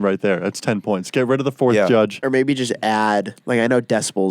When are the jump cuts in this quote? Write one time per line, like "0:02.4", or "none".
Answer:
0:02.2